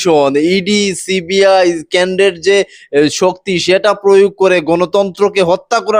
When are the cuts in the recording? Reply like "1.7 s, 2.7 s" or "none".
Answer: none